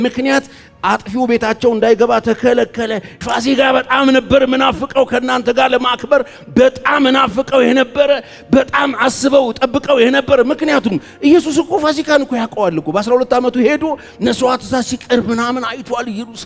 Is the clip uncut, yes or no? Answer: no